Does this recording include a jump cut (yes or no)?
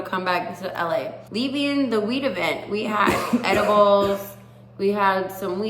yes